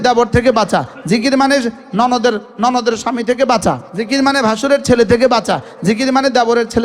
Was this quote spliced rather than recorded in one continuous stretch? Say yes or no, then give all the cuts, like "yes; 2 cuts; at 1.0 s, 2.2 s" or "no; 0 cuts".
yes; 1 cut; at 3.9 s